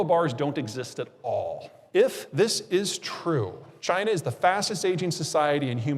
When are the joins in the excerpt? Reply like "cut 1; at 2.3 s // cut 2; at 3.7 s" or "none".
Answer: cut 1; at 1.7 s // cut 2; at 3.7 s